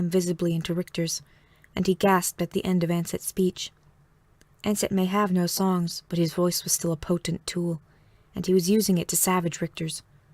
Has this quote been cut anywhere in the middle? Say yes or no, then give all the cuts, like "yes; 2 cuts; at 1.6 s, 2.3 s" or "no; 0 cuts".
yes; 1 cut; at 3.5 s